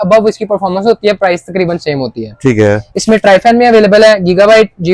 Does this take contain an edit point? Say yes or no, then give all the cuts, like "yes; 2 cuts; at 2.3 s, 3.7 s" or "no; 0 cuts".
no; 0 cuts